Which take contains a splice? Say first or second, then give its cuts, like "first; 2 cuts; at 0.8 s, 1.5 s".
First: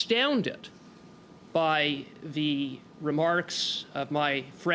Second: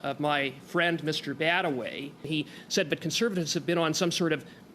second; 1 cut; at 2.3 s